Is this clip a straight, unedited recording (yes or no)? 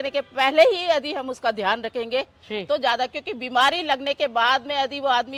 yes